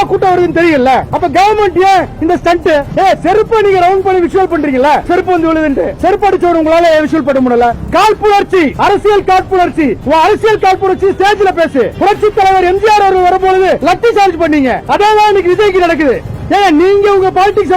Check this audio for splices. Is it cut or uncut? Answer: cut